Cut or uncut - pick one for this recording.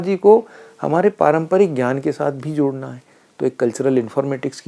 uncut